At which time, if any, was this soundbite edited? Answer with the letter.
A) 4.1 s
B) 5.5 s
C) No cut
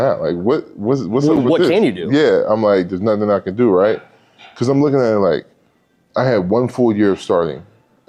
C